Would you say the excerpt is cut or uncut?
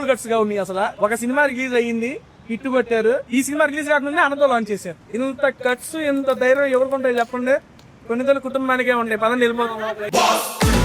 cut